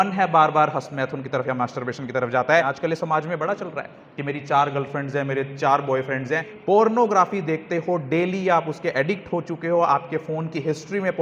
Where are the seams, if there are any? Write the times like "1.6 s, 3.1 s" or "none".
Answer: 2.9 s, 6.7 s